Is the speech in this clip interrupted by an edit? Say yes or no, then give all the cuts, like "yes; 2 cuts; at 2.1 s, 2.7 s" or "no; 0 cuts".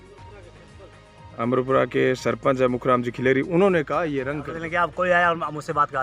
yes; 1 cut; at 4.4 s